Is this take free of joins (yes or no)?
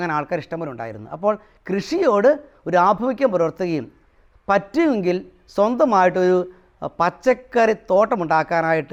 yes